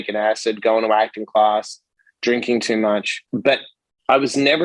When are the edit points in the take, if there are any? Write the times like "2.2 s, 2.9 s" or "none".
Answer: 3.2 s